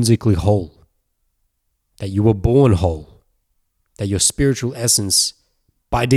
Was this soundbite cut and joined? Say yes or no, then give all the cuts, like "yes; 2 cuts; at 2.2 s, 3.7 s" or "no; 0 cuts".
no; 0 cuts